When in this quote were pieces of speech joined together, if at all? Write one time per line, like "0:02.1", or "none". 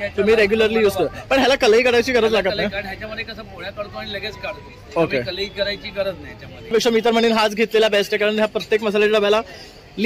0:06.7